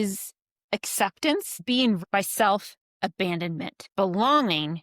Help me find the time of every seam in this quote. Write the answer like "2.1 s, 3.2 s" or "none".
2.0 s, 3.8 s